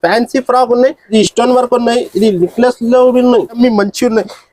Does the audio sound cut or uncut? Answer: cut